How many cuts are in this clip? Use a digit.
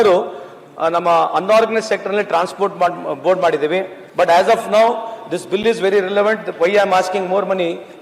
1